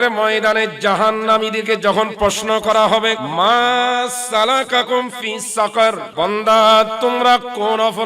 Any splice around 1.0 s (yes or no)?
no